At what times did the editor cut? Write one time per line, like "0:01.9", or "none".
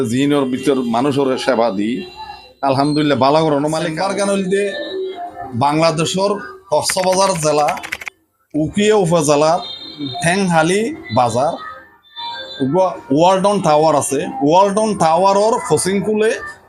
0:03.9